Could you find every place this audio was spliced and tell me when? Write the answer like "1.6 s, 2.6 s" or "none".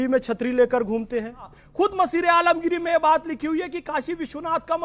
1.7 s